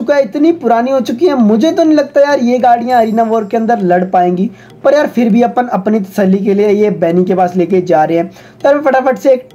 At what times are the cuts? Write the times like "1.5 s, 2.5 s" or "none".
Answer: none